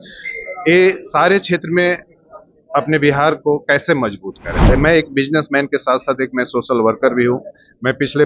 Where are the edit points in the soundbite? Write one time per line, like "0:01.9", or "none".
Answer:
0:04.6